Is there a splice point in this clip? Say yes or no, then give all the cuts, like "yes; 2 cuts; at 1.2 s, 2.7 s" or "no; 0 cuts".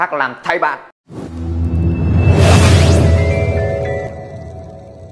no; 0 cuts